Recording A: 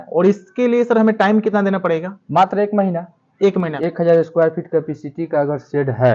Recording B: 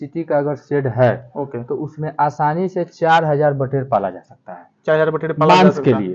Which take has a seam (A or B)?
A